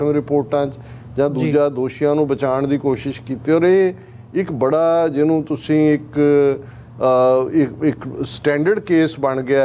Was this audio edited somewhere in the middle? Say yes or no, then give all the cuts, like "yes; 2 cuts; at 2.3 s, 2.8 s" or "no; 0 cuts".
no; 0 cuts